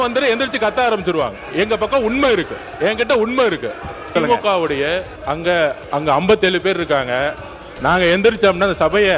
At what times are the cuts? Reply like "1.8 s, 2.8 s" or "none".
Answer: 4.1 s, 5.1 s, 5.8 s